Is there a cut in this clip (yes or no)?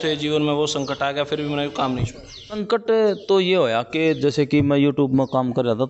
yes